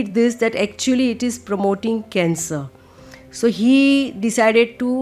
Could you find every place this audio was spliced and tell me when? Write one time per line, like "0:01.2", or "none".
none